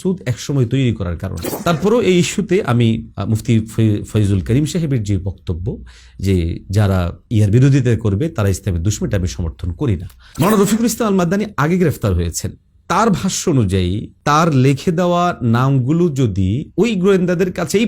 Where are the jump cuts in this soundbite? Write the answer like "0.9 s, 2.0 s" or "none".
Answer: 1.5 s, 10.2 s

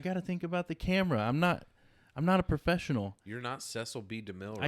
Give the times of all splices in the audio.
none

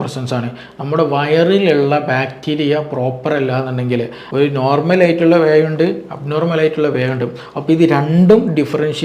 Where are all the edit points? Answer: 4.2 s

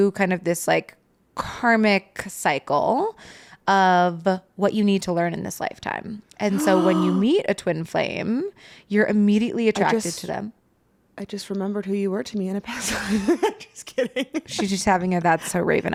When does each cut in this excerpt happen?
none

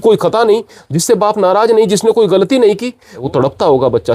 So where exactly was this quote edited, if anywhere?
3.2 s

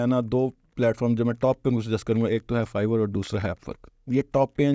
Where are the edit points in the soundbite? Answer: none

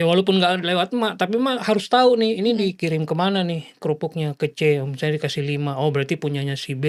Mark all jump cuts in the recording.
none

